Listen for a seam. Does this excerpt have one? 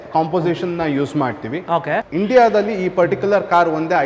yes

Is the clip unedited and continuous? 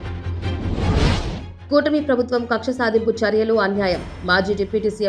no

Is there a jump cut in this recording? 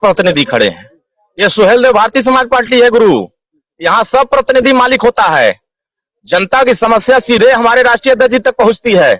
no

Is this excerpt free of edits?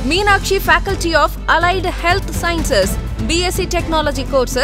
yes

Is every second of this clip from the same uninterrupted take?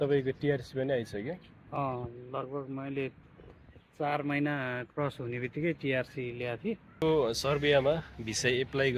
no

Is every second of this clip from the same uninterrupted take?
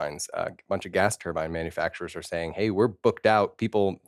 yes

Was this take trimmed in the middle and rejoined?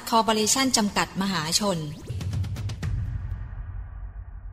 yes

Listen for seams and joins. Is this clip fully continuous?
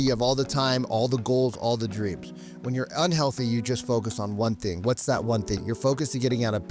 no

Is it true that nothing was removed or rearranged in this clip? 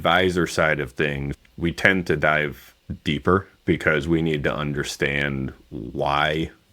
no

